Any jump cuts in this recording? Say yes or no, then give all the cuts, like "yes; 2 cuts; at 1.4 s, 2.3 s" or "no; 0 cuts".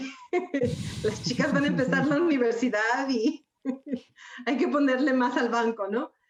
no; 0 cuts